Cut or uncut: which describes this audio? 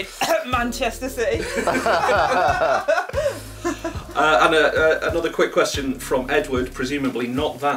uncut